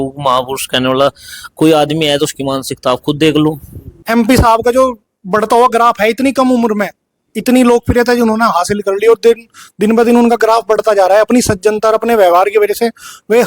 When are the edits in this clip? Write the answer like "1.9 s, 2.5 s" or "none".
4.0 s